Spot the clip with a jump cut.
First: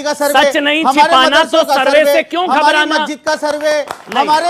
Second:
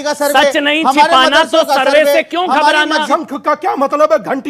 second; 1 cut; at 3.1 s

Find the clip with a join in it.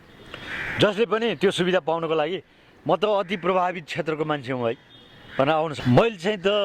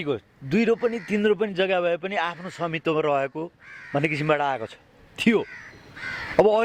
first; 1 cut; at 5.7 s

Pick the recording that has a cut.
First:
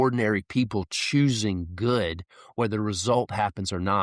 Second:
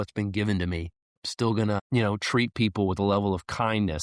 second; 1 cut; at 1.8 s

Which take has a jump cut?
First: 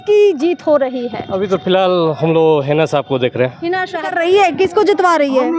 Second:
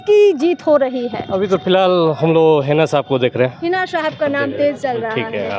first; 1 cut; at 4.1 s

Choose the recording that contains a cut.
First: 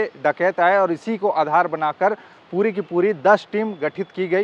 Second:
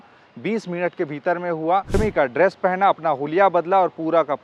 second; 1 cut; at 2.0 s

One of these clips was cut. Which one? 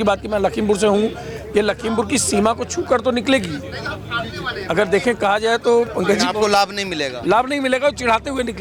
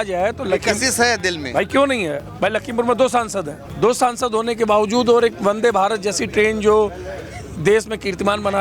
second; 1 cut; at 3.6 s

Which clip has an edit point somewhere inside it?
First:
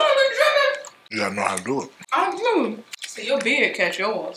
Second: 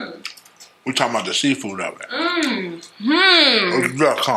first; 3 cuts; at 1.0 s, 2.0 s, 3.2 s

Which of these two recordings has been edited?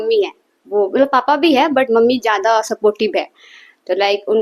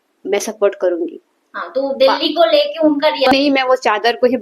second; 1 cut; at 3.3 s

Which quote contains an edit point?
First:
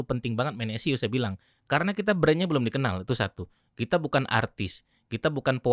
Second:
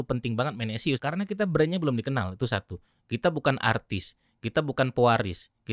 second; 1 cut; at 1.0 s

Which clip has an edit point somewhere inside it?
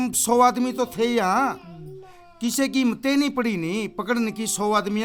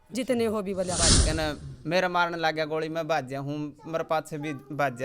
second; 1 cut; at 1.1 s

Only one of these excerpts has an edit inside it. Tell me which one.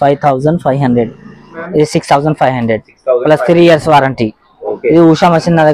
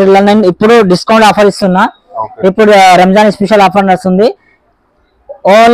first; 2 cuts; at 1.6 s, 4.7 s

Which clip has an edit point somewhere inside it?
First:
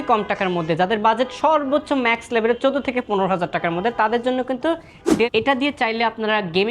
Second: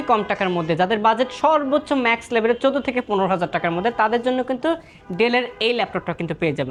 first; 1 cut; at 5.3 s

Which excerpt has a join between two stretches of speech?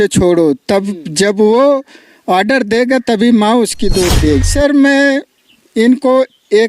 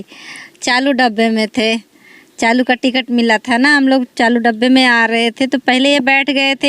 first; 1 cut; at 4.4 s

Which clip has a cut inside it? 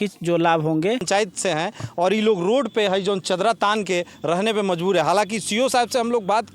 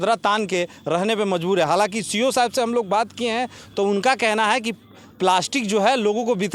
first; 1 cut; at 1.0 s

